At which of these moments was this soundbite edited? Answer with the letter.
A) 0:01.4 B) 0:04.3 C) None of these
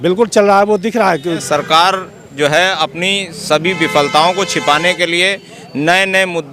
A